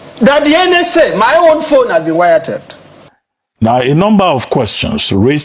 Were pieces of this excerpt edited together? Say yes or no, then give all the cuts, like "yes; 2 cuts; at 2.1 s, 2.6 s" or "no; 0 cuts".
yes; 1 cut; at 3.4 s